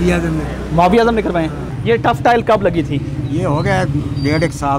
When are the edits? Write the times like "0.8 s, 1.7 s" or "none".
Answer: 1.7 s